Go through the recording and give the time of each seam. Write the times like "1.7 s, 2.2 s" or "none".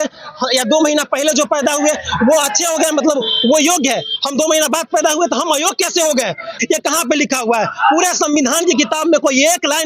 6.6 s

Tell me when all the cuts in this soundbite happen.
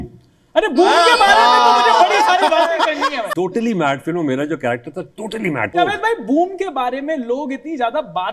3.2 s, 5.8 s

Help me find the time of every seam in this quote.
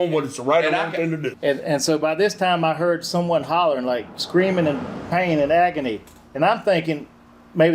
1.3 s

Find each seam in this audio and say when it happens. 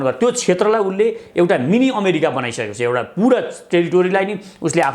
none

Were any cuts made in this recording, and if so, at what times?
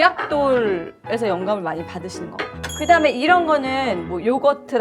2.5 s

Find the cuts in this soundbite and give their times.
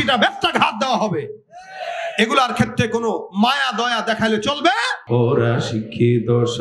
4.9 s

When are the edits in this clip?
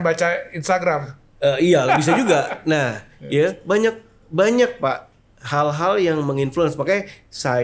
3.1 s

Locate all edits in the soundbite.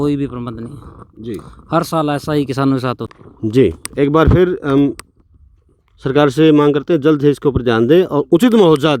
3.1 s

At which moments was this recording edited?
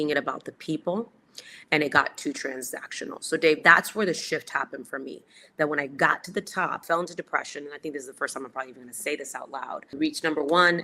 6.8 s, 9.9 s

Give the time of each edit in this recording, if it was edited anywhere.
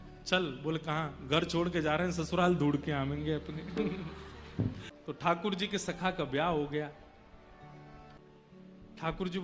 4.9 s, 8.2 s

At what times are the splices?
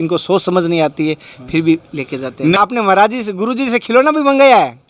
2.6 s

